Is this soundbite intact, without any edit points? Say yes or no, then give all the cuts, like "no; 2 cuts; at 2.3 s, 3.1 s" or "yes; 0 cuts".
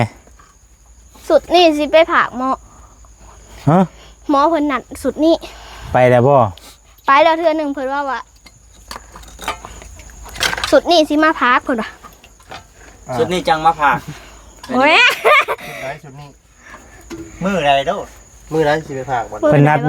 yes; 0 cuts